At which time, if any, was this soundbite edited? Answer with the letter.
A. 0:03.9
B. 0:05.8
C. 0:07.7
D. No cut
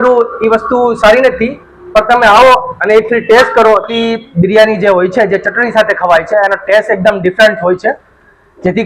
A